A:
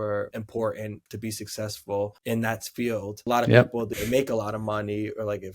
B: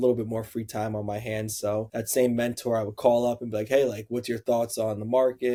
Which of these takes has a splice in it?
A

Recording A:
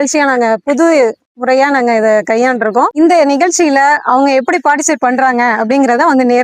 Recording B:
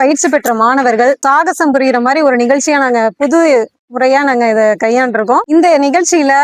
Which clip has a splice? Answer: B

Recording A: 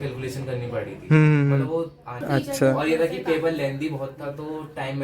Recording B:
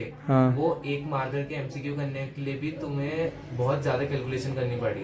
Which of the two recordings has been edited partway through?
A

